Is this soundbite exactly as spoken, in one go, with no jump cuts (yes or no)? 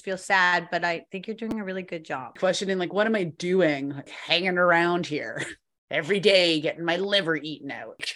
no